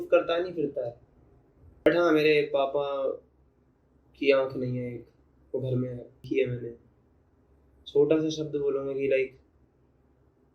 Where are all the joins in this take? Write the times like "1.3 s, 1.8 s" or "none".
1.9 s, 6.2 s